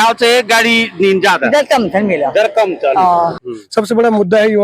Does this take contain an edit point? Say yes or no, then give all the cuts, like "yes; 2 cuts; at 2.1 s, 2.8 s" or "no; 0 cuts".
yes; 1 cut; at 3.4 s